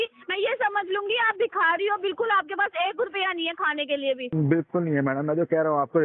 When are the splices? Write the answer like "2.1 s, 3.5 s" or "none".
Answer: 4.3 s